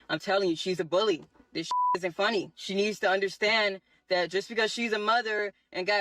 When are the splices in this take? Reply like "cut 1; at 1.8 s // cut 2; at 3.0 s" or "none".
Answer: cut 1; at 2.6 s